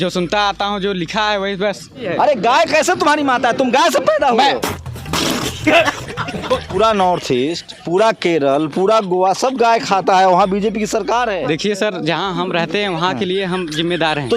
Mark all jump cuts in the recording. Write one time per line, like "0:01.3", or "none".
0:02.0
0:04.6
0:06.7
0:11.4